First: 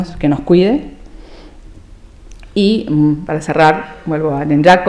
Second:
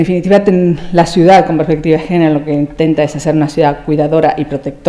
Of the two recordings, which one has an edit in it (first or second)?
second